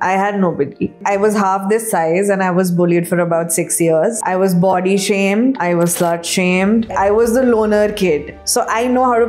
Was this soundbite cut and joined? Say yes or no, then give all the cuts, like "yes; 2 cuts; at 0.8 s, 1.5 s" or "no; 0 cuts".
yes; 4 cuts; at 4.2 s, 5.6 s, 6.9 s, 8.4 s